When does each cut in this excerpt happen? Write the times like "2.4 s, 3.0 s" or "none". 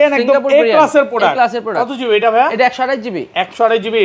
none